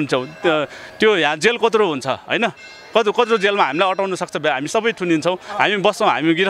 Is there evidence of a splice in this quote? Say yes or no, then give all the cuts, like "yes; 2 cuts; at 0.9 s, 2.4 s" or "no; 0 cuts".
no; 0 cuts